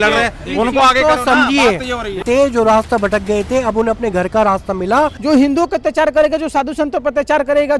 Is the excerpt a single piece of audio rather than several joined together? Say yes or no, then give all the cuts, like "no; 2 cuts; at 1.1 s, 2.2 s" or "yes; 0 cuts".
no; 2 cuts; at 2.2 s, 5.2 s